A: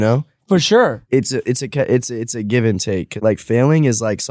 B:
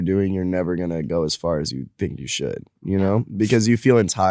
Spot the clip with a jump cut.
A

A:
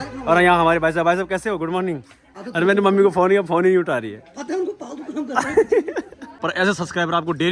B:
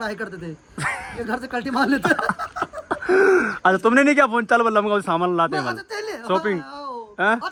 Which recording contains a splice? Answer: A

